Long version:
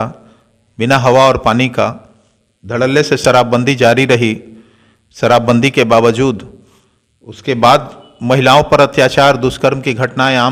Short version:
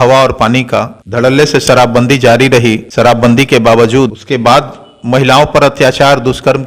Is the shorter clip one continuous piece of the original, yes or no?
no